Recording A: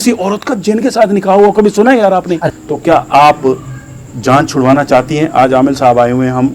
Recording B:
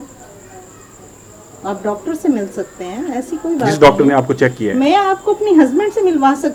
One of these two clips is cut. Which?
A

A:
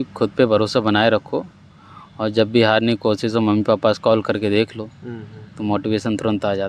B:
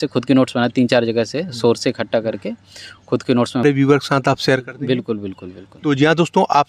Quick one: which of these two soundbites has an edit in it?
B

